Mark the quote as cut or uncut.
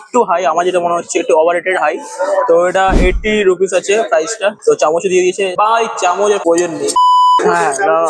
uncut